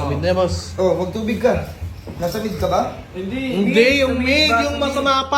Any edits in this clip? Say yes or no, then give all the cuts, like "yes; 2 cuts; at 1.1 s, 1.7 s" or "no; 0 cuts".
no; 0 cuts